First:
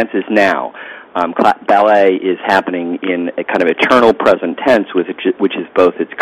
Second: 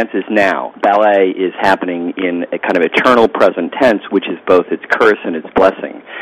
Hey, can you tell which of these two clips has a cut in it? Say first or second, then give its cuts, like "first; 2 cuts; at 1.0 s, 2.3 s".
second; 2 cuts; at 0.8 s, 4.1 s